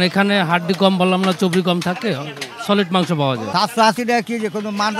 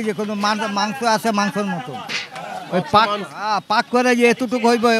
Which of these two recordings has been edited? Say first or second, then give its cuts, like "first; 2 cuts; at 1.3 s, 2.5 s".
first; 1 cut; at 3.4 s